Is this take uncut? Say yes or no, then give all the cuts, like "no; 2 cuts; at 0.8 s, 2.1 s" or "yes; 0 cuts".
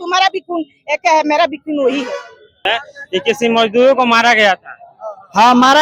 no; 1 cut; at 2.7 s